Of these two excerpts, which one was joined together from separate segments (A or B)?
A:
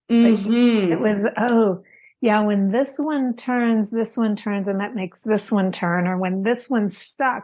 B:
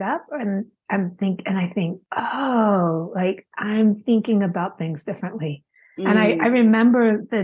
B